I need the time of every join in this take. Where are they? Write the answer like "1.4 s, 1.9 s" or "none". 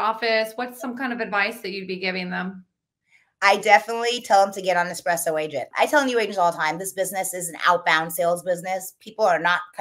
5.7 s